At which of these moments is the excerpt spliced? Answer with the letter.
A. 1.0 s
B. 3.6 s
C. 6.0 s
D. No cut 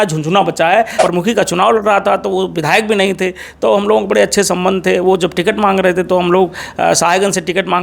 A